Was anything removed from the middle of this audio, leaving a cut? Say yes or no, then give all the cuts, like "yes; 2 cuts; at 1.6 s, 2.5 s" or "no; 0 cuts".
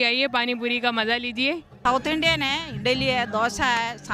yes; 1 cut; at 1.7 s